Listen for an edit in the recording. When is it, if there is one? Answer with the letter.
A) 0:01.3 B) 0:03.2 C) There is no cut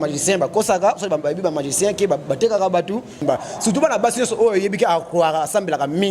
B